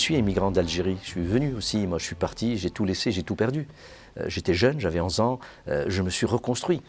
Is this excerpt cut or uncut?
uncut